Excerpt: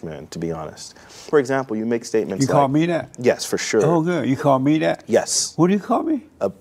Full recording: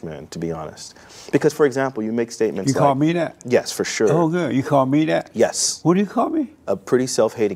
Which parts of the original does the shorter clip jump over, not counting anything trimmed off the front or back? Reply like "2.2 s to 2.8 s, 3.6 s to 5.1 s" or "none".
1.3 s to 1.5 s

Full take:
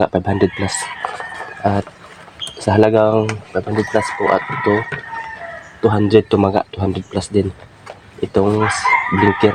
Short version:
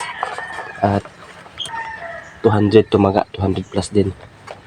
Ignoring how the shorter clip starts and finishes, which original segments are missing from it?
2.4 s to 5.0 s

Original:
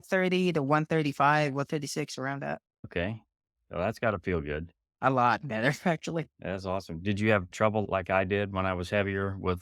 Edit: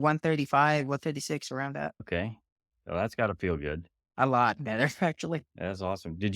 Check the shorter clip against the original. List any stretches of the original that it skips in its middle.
2.7 s to 2.8 s

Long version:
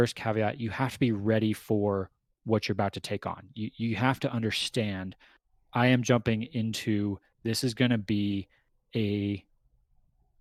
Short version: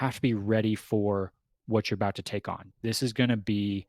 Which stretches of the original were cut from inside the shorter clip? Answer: 3.5 s to 7.3 s

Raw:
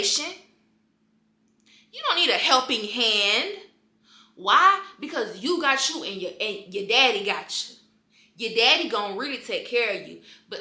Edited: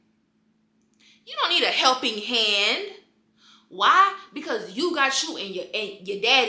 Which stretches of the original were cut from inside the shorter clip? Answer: none

